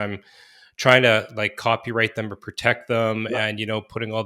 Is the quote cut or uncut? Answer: uncut